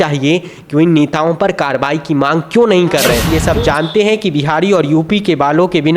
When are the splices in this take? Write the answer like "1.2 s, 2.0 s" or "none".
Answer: 3.2 s